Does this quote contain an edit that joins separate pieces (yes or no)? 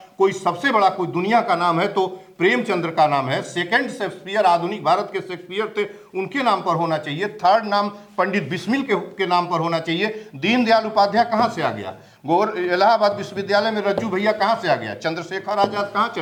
no